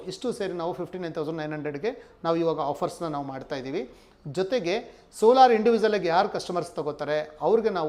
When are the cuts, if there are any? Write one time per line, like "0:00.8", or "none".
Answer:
none